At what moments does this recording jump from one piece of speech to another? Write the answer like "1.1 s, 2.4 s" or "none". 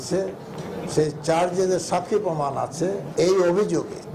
3.1 s